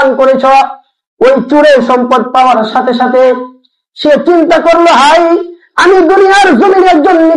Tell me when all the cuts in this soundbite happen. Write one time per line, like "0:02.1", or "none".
none